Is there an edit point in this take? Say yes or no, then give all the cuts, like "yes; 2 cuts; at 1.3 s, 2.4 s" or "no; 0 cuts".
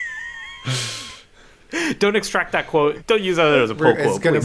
yes; 1 cut; at 3.0 s